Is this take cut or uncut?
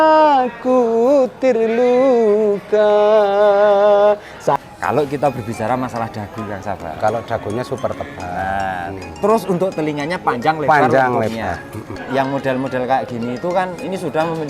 cut